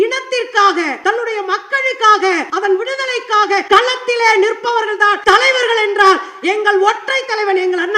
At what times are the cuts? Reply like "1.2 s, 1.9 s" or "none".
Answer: 0.9 s, 2.5 s, 3.6 s, 5.2 s